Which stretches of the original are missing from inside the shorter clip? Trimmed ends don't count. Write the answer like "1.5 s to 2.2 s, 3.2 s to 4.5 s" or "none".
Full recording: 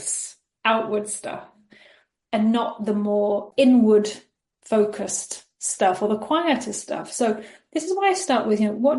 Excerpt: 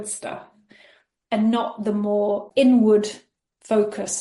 none